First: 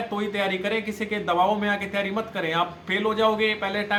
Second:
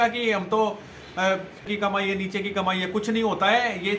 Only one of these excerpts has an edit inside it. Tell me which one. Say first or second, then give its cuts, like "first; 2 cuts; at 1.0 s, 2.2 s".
second; 1 cut; at 1.6 s